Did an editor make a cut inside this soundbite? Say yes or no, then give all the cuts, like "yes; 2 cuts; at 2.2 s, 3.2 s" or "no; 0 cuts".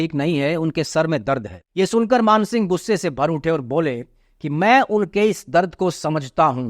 yes; 1 cut; at 1.6 s